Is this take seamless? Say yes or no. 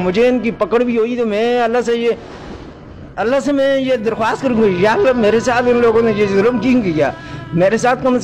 yes